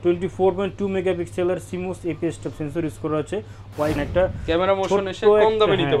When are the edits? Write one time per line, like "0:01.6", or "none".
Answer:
0:04.0